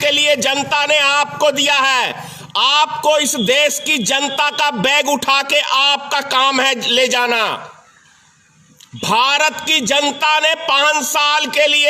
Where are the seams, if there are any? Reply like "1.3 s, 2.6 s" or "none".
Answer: none